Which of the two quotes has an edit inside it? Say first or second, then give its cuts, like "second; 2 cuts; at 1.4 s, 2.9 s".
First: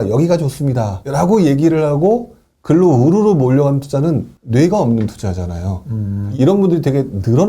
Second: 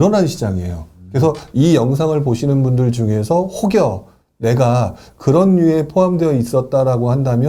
first; 3 cuts; at 1.0 s, 4.3 s, 6.2 s